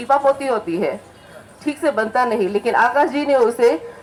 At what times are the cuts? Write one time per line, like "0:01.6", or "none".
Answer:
none

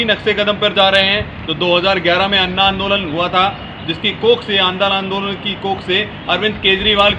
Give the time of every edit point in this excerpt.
none

